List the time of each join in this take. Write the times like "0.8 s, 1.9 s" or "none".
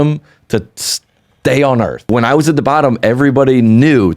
2.0 s